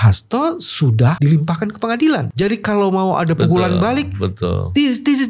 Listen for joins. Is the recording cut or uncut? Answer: cut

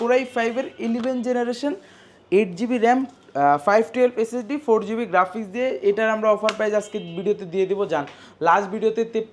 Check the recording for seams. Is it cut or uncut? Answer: uncut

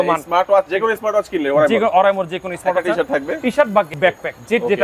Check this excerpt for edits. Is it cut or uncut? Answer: cut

